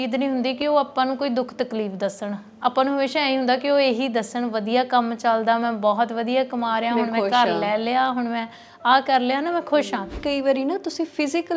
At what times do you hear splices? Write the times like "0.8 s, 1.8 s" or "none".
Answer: 10.2 s